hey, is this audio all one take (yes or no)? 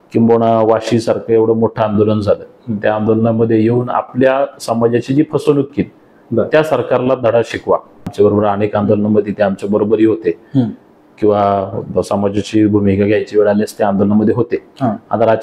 no